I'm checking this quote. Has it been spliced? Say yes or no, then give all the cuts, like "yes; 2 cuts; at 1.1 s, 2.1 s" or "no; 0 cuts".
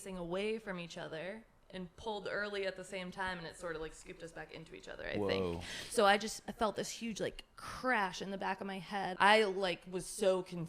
yes; 1 cut; at 9.1 s